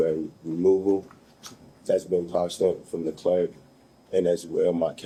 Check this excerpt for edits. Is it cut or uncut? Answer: uncut